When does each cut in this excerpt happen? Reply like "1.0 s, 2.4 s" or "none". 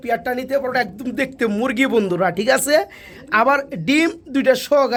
none